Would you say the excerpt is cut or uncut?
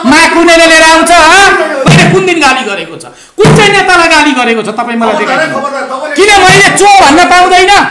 cut